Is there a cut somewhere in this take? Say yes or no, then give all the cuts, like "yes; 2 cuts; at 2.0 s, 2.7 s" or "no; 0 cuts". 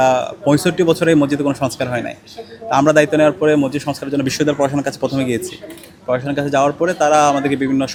no; 0 cuts